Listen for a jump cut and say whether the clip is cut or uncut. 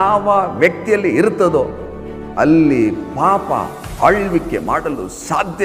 uncut